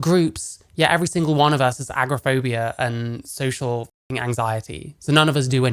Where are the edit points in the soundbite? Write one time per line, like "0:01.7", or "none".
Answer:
none